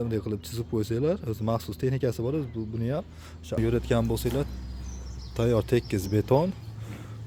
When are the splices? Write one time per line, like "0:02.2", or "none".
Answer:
0:03.6